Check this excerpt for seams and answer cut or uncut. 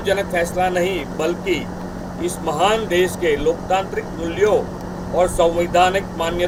uncut